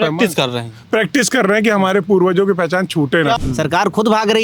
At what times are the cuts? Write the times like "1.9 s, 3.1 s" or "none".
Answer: 3.4 s